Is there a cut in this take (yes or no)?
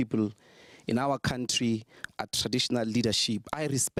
no